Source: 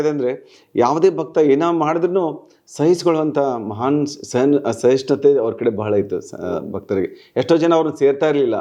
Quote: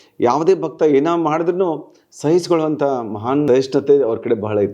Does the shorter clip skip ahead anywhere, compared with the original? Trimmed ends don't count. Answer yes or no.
yes